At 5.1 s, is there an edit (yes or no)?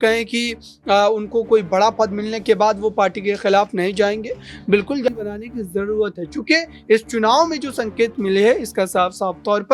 yes